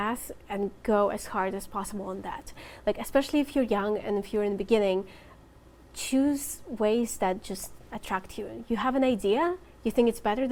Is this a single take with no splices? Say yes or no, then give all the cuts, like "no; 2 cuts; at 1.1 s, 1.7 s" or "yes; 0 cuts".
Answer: yes; 0 cuts